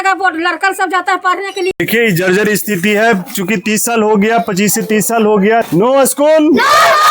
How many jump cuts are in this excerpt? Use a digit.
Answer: 2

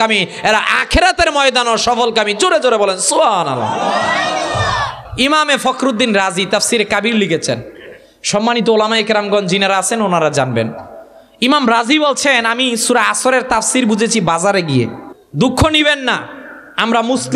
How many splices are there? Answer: 2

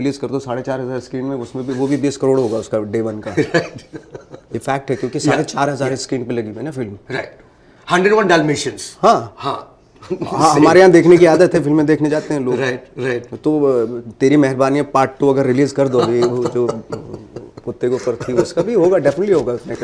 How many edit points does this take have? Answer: 0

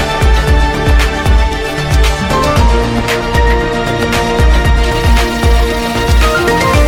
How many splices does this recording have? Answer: 0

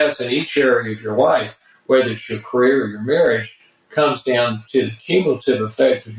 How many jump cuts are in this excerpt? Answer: 0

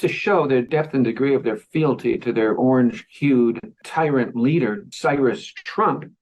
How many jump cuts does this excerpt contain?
1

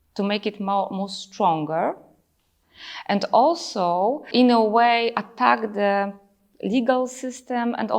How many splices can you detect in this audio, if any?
1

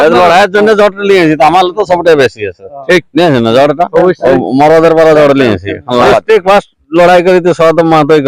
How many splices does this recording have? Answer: 1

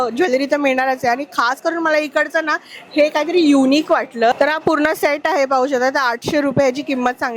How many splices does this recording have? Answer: 1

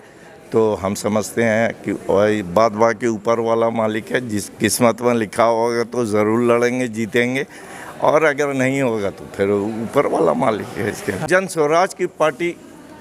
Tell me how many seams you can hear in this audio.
1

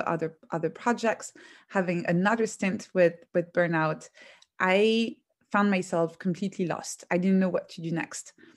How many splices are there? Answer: 1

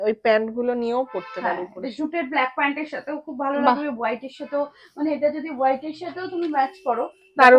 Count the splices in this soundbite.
0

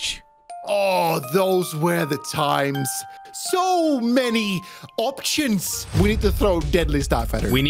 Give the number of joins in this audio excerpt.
1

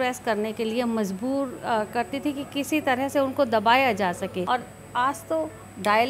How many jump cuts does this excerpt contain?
1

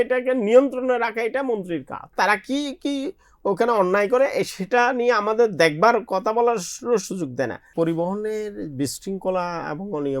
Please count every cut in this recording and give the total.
2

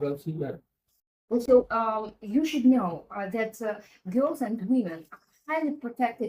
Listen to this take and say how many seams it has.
0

